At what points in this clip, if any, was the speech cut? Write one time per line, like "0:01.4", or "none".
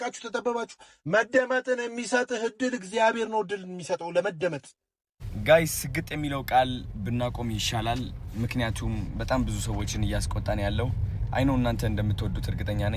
0:05.3